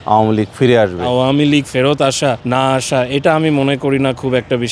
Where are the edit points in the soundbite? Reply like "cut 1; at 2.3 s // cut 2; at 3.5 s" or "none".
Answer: cut 1; at 1.0 s // cut 2; at 2.4 s